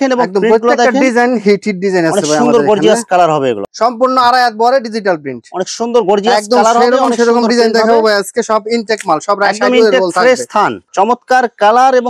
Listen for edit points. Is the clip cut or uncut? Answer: cut